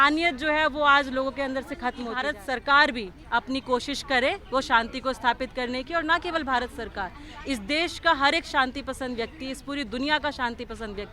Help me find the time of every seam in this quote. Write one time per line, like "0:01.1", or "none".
0:02.2